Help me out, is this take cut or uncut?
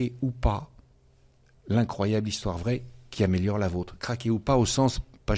uncut